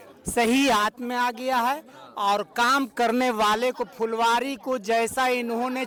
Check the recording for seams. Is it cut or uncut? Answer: uncut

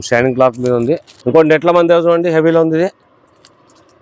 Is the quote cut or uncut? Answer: cut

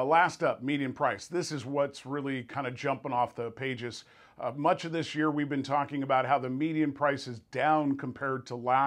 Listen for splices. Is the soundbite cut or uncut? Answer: uncut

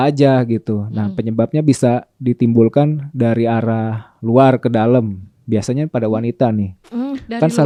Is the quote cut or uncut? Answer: uncut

